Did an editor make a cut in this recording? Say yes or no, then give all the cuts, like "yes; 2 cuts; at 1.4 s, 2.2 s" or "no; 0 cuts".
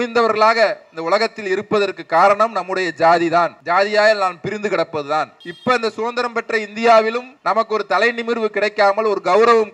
yes; 3 cuts; at 3.6 s, 5.4 s, 7.3 s